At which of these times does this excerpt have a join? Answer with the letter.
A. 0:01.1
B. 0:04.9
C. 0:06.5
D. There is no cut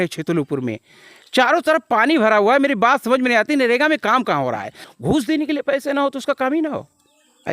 B